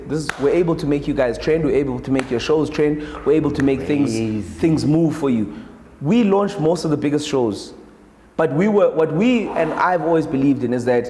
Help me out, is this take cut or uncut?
uncut